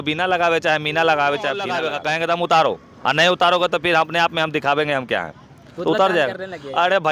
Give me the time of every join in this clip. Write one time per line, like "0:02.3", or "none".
0:01.9